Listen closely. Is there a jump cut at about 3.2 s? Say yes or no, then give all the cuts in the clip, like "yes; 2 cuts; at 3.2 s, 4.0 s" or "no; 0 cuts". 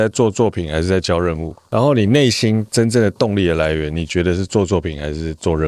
no; 1 cut; at 1.5 s